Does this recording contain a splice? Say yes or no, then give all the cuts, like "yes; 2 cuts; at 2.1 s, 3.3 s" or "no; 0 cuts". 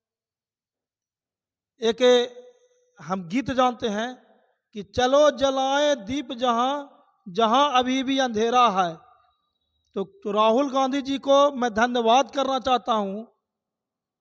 no; 0 cuts